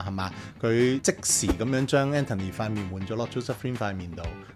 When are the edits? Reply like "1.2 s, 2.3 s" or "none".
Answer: 1.0 s